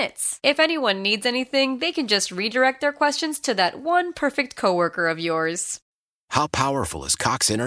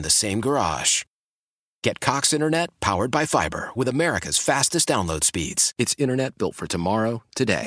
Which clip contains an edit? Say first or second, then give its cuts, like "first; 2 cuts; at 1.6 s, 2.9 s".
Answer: first; 1 cut; at 5.9 s